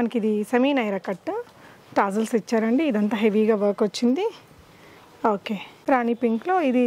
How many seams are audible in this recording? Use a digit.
1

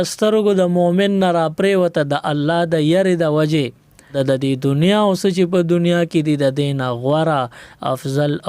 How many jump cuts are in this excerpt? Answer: 1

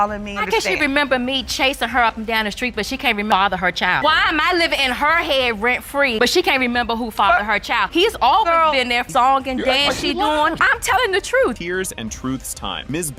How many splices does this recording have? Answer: 0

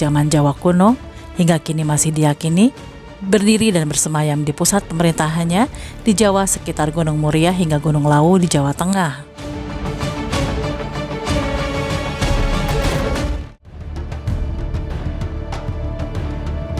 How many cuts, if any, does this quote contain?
0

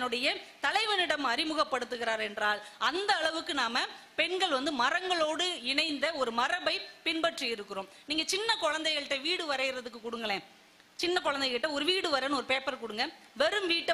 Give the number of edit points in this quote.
0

